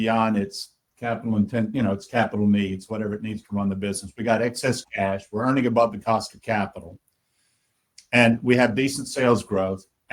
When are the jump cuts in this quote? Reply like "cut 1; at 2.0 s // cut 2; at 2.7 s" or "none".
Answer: none